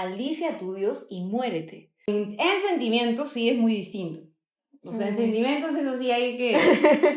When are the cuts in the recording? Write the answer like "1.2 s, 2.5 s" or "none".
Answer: 2.1 s